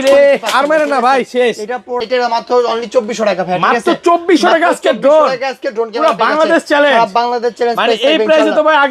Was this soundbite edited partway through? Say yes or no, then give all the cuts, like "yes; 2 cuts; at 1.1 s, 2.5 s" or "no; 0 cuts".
yes; 1 cut; at 2.0 s